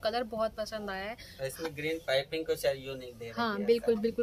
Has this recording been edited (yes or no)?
no